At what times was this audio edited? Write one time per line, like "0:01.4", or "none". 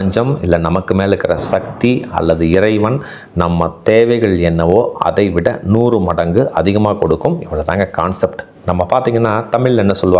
none